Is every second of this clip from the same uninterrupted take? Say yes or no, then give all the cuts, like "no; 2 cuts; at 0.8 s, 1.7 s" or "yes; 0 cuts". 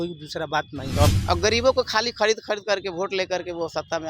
no; 1 cut; at 1.1 s